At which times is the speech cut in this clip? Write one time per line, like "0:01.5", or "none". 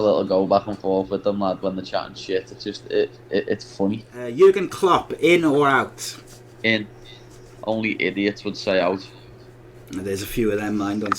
0:04.1